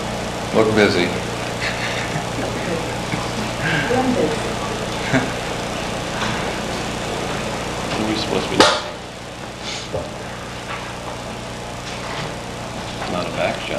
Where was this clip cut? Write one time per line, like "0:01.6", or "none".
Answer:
none